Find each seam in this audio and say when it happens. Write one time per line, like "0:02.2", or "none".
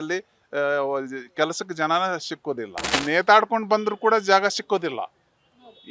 0:03.0